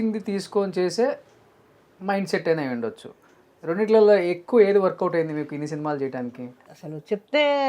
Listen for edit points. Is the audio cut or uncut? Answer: cut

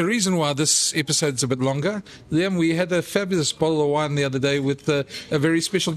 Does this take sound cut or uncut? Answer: uncut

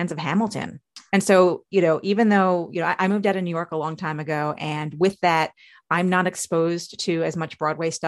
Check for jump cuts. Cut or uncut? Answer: cut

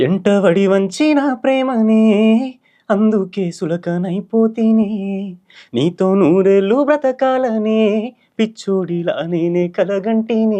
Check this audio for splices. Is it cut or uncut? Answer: uncut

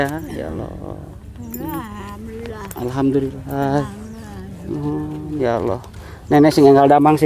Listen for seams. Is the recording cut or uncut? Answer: uncut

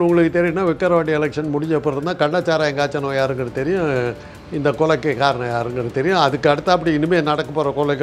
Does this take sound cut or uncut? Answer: uncut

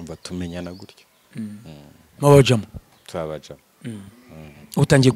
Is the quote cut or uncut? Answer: uncut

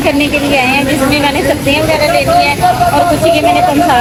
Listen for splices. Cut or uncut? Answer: uncut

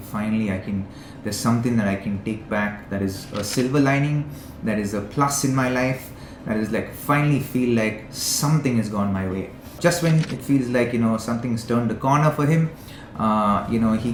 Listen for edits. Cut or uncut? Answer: uncut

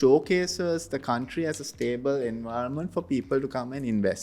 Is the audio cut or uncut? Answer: uncut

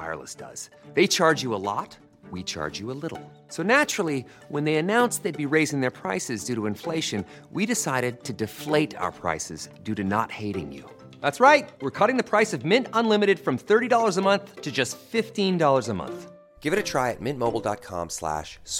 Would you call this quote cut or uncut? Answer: uncut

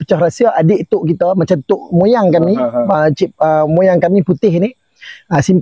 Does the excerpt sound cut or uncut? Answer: uncut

